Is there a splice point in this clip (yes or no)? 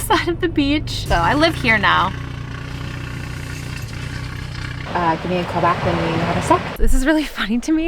yes